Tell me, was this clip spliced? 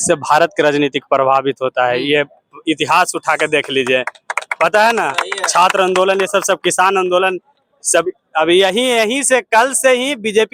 no; 0 cuts

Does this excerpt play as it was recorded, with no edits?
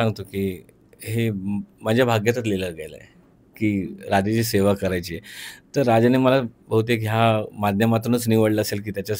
yes; 0 cuts

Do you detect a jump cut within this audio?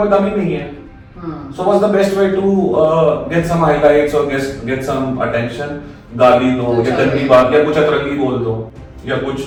no; 0 cuts

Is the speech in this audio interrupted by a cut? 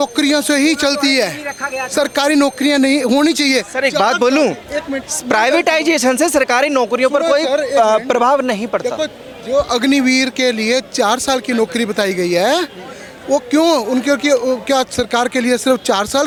no; 0 cuts

